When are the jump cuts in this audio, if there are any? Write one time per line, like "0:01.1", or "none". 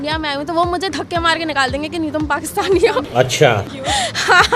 none